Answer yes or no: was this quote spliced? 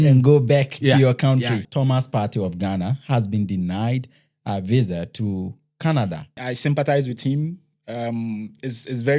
yes